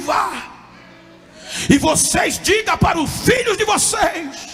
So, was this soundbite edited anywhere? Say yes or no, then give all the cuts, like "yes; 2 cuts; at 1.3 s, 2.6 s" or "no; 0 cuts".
no; 0 cuts